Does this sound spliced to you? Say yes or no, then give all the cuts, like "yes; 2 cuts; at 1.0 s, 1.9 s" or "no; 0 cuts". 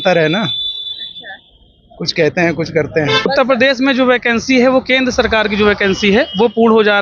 yes; 1 cut; at 3.2 s